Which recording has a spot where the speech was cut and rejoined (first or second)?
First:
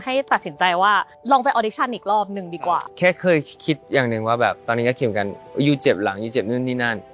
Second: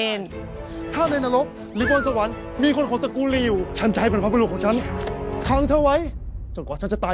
first